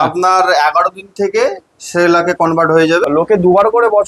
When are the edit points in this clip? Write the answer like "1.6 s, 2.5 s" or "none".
3.0 s